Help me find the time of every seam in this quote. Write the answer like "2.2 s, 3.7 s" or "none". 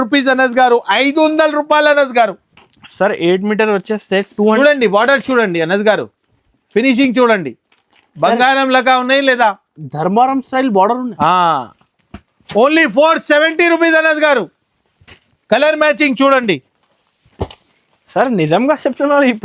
4.6 s

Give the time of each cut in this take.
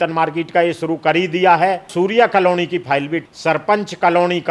1.9 s, 3.2 s

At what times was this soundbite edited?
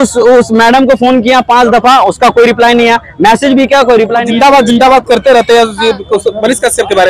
4.3 s

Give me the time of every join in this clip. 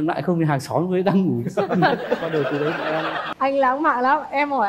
3.3 s

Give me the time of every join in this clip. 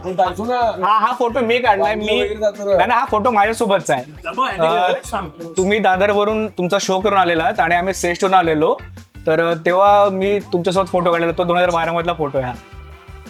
none

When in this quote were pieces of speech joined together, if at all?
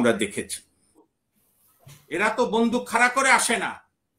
1.0 s

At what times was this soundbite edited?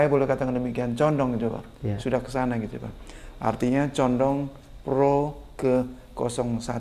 none

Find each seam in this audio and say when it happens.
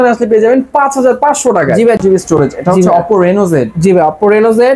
2.0 s

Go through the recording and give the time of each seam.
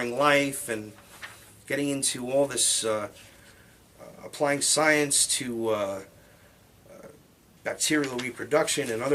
1.1 s

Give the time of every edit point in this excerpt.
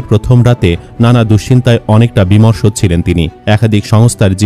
3.3 s

